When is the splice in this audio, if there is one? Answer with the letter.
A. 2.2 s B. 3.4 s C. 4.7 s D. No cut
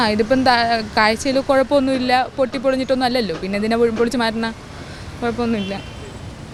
D